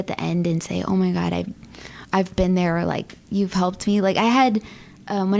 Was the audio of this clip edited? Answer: no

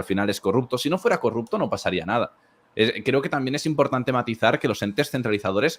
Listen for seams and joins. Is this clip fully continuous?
yes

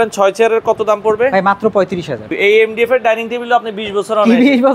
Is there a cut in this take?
yes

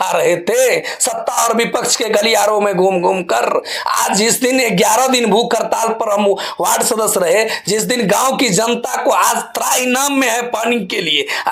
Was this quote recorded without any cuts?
yes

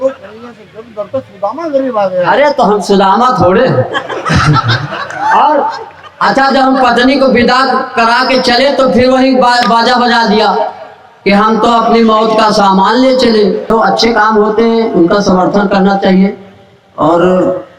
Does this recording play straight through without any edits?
no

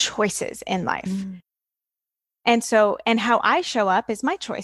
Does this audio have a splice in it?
no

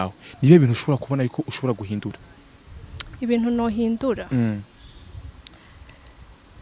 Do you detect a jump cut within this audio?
no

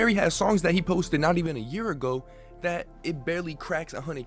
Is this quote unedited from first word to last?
yes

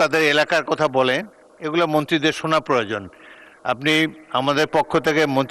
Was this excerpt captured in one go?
yes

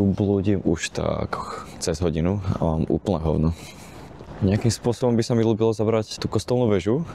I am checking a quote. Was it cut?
no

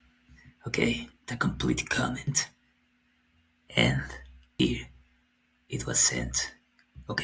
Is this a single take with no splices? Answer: no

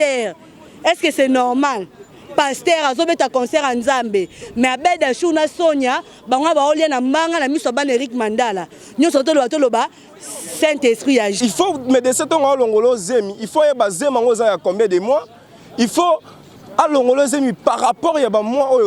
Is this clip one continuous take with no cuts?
no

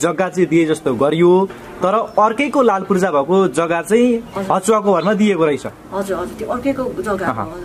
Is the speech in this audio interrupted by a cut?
no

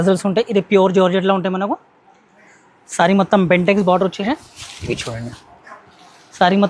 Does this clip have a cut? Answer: no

